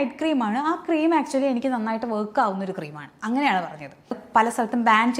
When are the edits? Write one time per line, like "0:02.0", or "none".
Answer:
0:04.2